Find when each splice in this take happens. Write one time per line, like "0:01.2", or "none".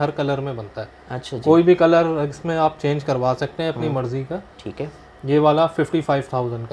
none